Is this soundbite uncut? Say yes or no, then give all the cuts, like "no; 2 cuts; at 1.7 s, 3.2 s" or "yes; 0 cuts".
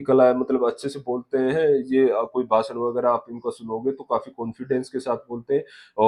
yes; 0 cuts